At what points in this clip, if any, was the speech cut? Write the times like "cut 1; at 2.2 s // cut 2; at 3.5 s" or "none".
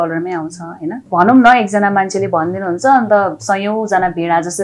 cut 1; at 1.1 s